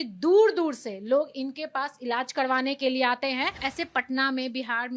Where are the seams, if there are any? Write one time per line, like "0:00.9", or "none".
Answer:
0:03.6